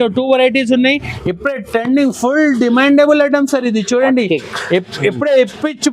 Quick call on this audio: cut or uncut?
cut